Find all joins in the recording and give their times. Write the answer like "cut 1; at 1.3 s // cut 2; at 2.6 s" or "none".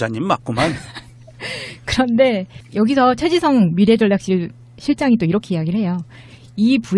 none